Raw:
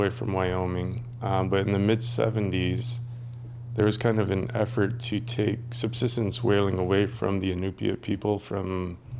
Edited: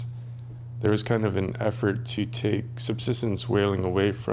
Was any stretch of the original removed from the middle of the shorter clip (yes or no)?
no